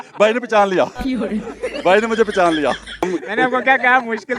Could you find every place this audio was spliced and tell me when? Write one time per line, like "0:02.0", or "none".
0:03.1